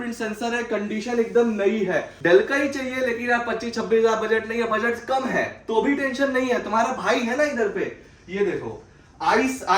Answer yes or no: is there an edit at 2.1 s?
yes